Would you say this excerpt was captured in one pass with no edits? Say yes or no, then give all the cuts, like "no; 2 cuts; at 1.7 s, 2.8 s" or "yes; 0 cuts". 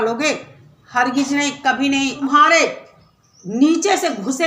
no; 1 cut; at 2.2 s